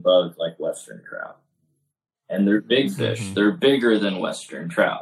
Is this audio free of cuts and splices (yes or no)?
yes